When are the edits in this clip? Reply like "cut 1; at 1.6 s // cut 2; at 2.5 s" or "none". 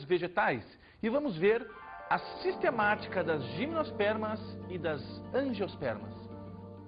cut 1; at 2.7 s